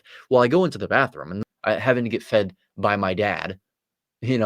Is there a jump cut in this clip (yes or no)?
yes